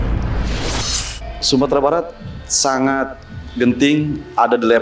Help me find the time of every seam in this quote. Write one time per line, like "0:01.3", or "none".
0:01.1